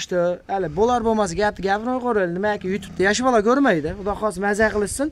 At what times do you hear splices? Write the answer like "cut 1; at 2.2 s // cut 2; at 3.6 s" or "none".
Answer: none

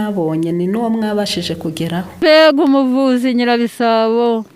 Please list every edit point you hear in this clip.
cut 1; at 2.2 s

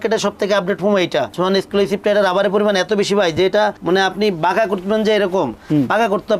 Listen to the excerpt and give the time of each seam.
cut 1; at 1.3 s

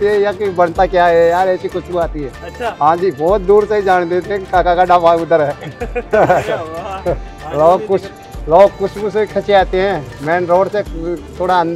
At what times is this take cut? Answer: none

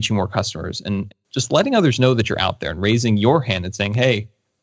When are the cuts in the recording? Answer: cut 1; at 1.1 s

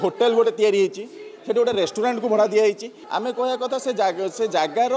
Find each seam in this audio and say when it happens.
cut 1; at 3.0 s

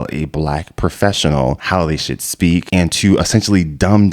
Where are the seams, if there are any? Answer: cut 1; at 1.6 s // cut 2; at 2.7 s

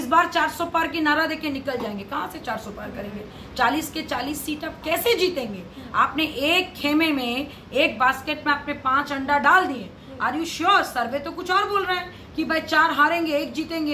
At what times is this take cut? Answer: none

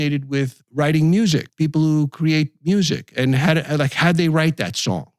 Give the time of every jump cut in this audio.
cut 1; at 1.5 s

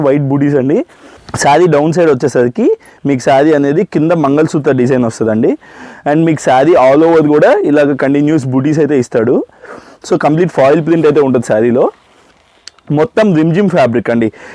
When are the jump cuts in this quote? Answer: cut 1; at 1.3 s

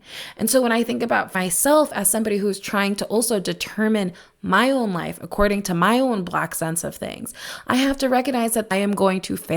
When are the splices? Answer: cut 1; at 1.3 s // cut 2; at 8.7 s

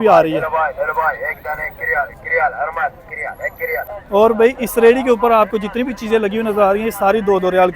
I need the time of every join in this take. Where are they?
cut 1; at 4.0 s

